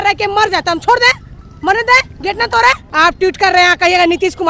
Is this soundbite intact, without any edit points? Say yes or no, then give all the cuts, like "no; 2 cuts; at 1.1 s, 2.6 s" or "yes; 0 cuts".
no; 1 cut; at 2.9 s